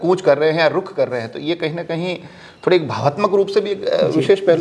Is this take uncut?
yes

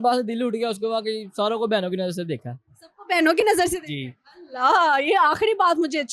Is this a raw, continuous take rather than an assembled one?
yes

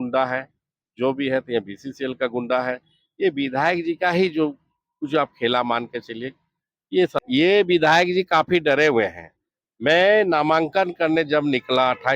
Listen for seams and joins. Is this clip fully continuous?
no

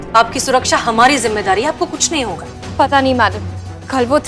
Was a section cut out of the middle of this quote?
no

